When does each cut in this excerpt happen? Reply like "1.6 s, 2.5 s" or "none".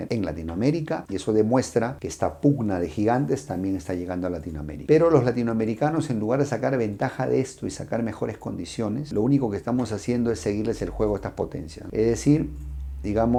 none